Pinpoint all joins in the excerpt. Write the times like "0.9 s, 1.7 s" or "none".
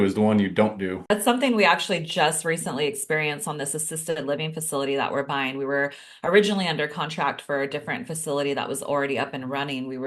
1.1 s